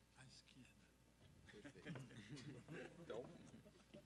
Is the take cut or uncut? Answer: uncut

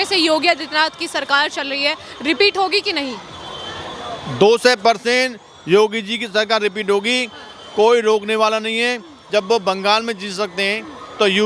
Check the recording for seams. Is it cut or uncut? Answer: uncut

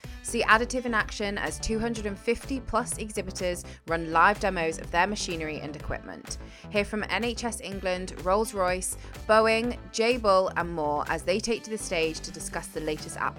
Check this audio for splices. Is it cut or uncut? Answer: uncut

